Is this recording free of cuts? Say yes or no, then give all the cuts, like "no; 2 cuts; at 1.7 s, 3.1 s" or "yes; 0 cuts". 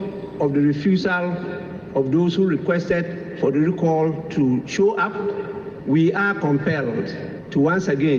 yes; 0 cuts